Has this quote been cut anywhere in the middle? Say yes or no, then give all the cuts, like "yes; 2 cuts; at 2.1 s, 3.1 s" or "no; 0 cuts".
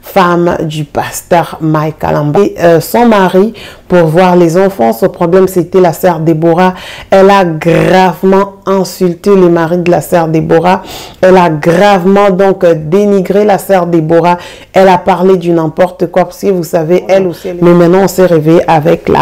yes; 2 cuts; at 2.4 s, 17.4 s